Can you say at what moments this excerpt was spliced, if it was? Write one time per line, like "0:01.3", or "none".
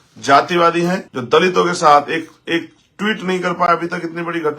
0:01.1

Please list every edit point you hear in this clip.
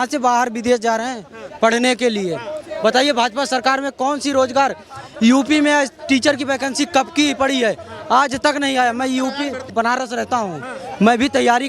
0:09.7

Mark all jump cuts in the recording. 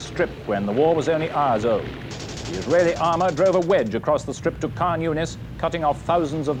none

